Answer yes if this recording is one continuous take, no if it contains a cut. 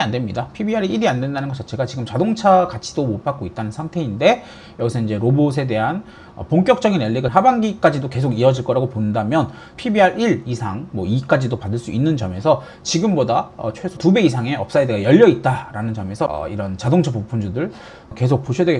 yes